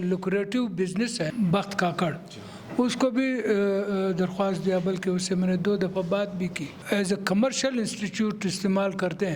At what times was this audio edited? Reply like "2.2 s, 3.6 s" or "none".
1.3 s